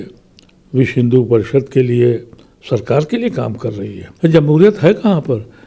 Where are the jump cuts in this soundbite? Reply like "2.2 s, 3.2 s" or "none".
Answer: 4.0 s